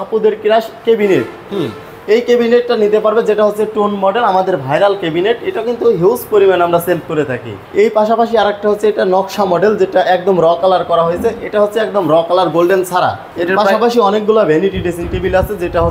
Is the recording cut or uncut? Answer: cut